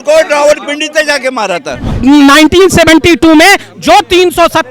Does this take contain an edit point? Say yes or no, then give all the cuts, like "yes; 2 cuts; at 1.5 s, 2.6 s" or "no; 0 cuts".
yes; 1 cut; at 1.9 s